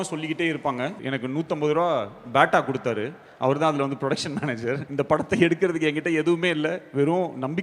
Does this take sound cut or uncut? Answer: cut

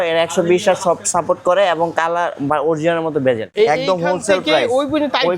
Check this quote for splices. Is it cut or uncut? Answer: cut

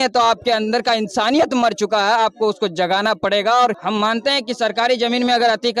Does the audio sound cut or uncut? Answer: uncut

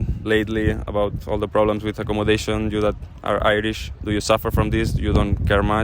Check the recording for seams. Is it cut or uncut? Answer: uncut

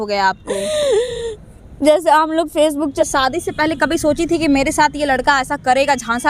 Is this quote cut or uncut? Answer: cut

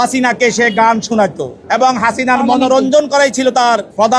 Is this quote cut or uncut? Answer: cut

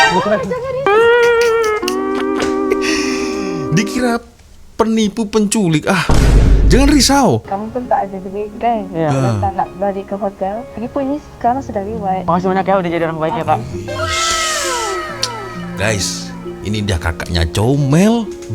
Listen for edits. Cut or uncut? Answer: cut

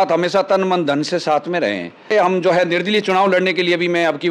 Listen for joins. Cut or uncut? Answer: cut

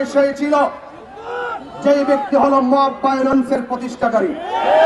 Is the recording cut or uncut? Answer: uncut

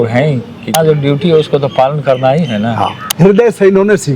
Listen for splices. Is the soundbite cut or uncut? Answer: cut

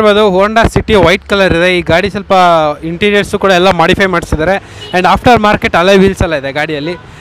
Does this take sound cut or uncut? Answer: uncut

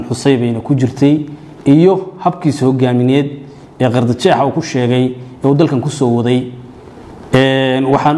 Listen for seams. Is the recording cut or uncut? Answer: uncut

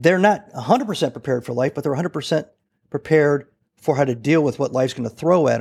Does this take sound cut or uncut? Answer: uncut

